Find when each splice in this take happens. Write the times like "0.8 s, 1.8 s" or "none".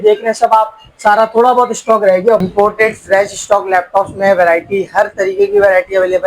2.4 s

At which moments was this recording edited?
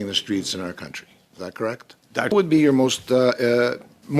2.3 s

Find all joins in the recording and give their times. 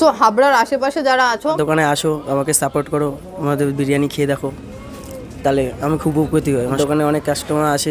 1.6 s, 6.8 s

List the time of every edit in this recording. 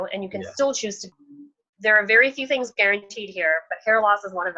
1.1 s

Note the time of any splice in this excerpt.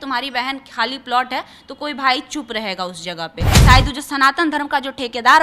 3.5 s

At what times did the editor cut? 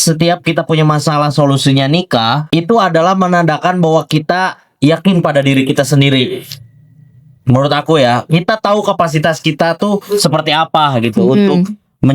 2.4 s

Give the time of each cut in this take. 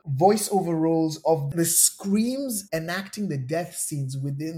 none

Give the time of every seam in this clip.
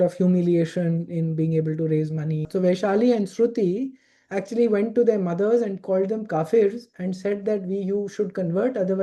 2.4 s

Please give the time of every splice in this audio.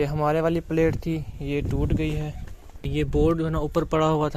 2.9 s

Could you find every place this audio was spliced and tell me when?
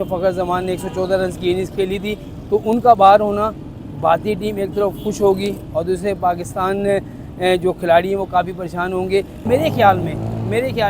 9.4 s

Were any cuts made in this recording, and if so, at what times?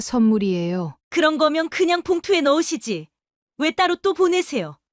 none

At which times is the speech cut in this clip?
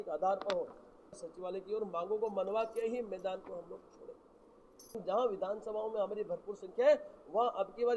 1.1 s, 5.0 s

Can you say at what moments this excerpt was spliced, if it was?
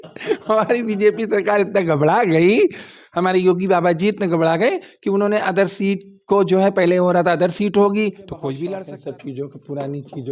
8.7 s

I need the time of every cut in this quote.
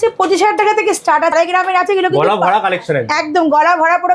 1.3 s

